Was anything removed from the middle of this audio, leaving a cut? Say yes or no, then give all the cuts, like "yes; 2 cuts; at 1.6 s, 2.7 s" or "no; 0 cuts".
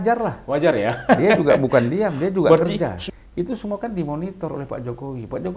yes; 1 cut; at 3.0 s